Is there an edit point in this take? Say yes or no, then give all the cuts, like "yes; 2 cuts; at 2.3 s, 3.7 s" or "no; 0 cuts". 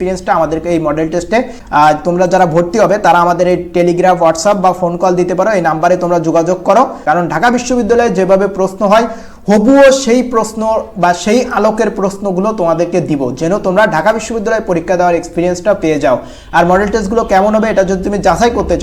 yes; 2 cuts; at 1.6 s, 7.0 s